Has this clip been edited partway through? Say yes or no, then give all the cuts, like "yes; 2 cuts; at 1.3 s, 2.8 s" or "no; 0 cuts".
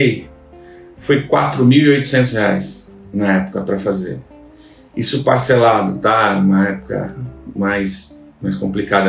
no; 0 cuts